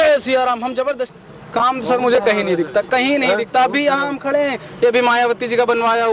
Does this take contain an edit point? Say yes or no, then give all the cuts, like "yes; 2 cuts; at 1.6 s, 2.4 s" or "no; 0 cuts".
yes; 1 cut; at 1.1 s